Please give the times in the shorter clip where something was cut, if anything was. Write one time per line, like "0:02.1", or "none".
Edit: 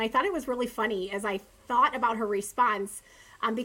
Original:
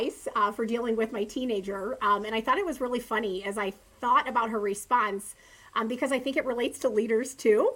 none